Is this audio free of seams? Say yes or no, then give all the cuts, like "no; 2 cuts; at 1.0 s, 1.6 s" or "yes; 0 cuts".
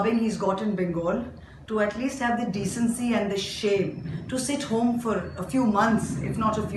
yes; 0 cuts